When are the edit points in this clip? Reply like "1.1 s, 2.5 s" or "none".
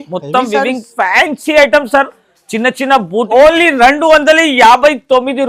3.2 s